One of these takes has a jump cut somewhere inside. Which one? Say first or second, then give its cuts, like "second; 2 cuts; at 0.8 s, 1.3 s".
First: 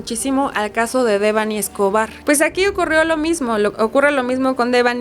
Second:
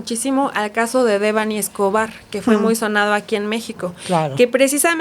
first; 1 cut; at 2.1 s